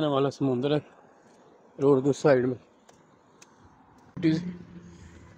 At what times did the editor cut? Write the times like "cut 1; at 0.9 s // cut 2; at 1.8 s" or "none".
cut 1; at 4.2 s